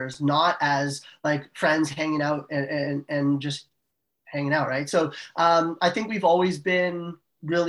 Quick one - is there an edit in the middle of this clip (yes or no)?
no